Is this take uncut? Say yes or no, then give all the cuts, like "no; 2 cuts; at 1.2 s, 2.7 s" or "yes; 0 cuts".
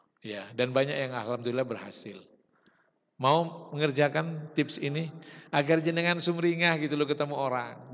yes; 0 cuts